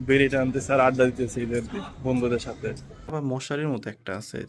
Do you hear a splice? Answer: yes; 1 cut; at 3.1 s

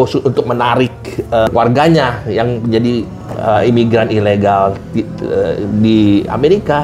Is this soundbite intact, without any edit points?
yes; 0 cuts

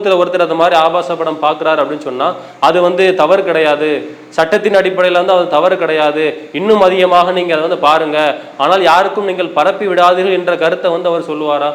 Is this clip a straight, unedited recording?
yes; 0 cuts

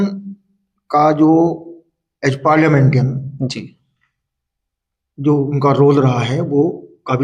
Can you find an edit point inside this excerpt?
no; 0 cuts

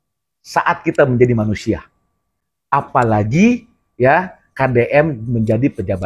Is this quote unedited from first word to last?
yes; 0 cuts

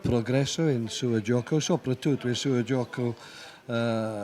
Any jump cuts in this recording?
no; 0 cuts

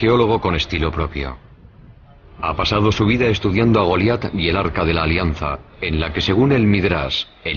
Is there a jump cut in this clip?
yes; 1 cut; at 1.8 s

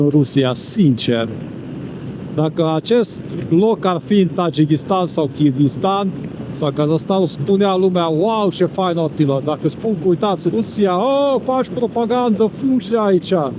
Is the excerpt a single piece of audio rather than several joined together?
yes; 0 cuts

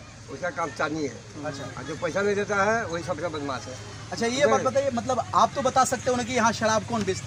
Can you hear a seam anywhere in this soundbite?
no; 0 cuts

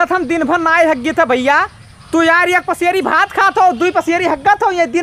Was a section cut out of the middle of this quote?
no; 0 cuts

